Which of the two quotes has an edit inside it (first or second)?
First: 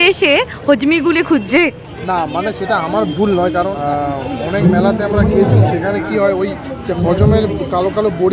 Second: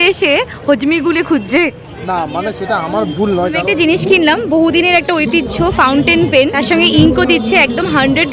second